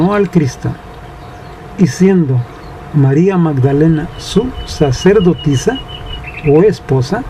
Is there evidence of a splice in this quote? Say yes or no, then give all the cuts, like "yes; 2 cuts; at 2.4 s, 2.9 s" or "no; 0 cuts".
no; 0 cuts